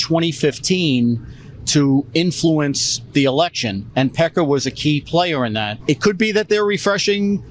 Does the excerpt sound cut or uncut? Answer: cut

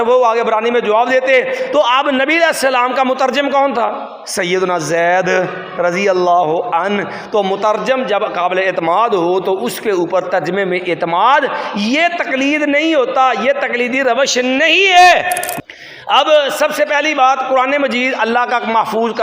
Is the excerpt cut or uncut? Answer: cut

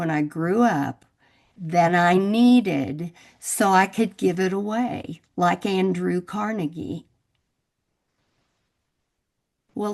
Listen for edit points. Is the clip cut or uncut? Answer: uncut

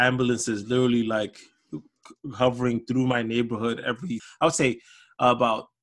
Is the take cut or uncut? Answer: cut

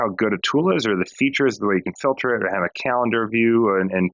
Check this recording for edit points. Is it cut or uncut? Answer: uncut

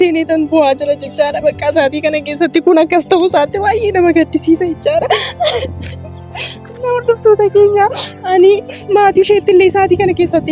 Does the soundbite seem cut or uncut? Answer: uncut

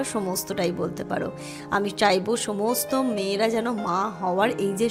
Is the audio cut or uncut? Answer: uncut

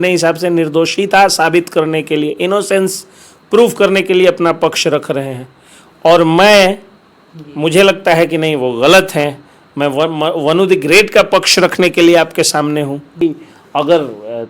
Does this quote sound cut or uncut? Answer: cut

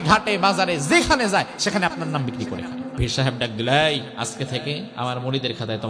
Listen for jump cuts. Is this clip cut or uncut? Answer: cut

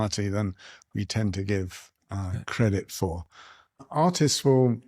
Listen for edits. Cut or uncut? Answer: cut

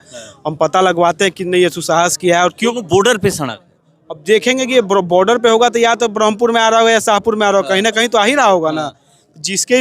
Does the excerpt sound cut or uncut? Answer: cut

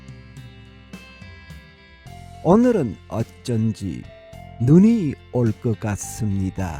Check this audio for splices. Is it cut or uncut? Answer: uncut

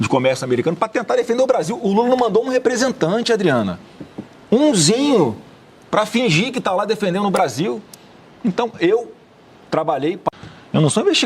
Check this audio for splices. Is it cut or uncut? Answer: cut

